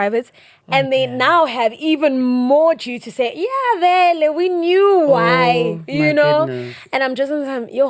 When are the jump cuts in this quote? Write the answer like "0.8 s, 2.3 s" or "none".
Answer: none